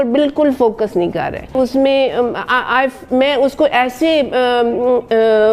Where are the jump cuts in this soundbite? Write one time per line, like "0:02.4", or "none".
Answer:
0:01.5